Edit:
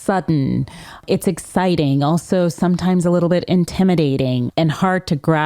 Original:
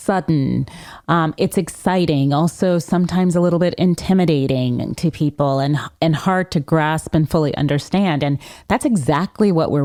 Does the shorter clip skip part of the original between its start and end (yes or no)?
yes